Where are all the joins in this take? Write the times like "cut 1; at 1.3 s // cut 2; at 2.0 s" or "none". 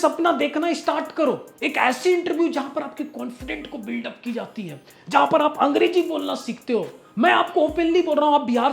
cut 1; at 1.5 s